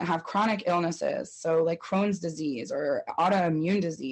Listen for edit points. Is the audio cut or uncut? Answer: uncut